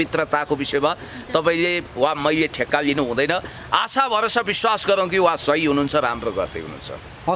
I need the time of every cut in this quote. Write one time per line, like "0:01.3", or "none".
none